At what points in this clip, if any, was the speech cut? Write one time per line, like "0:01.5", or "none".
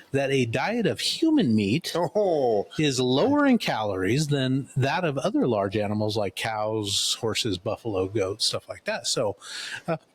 none

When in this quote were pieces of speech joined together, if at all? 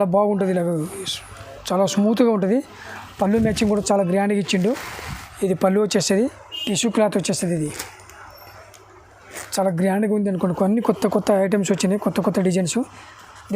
0:06.1

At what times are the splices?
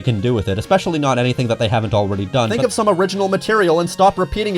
0:02.5

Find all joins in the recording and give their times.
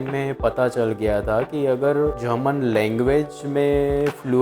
none

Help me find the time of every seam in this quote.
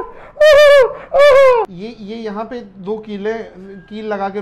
0:01.7

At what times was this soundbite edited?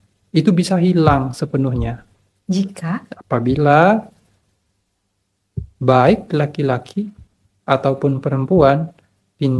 none

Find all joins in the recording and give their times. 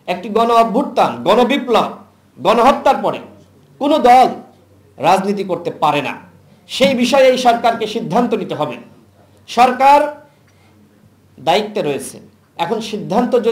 none

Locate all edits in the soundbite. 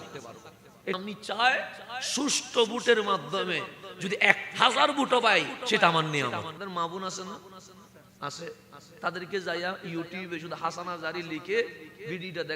0:01.0
0:06.6

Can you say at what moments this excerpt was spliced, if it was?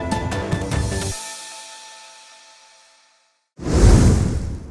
0:03.4

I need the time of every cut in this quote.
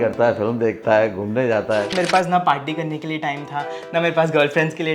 0:01.9

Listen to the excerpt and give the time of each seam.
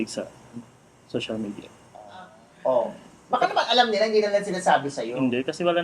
0:02.4

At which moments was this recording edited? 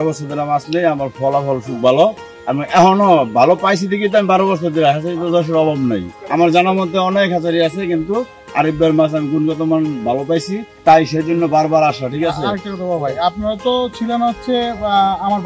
0:02.3
0:06.2
0:10.7

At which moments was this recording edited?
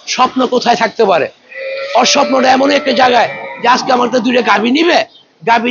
none

